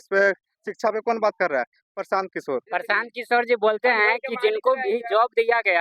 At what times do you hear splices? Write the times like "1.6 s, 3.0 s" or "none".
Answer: 2.7 s